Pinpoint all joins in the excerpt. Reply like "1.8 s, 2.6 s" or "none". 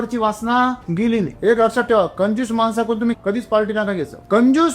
1.1 s